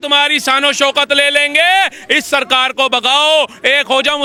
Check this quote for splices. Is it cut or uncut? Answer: uncut